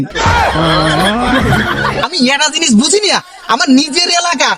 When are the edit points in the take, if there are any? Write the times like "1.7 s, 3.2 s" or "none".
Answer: 2.0 s